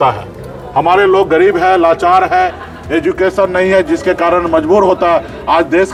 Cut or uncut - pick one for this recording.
uncut